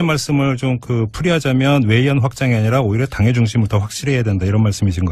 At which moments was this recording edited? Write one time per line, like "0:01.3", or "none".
0:02.3